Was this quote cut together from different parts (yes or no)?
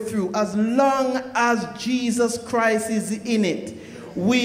no